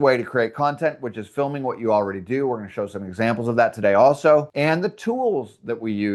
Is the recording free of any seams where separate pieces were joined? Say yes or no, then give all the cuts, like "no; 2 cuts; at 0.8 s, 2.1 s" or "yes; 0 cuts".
yes; 0 cuts